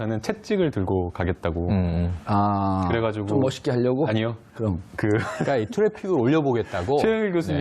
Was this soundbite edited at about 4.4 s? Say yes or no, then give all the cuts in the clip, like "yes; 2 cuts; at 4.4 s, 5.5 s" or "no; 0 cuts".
no; 1 cut; at 5.9 s